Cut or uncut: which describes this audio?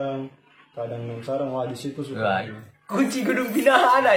cut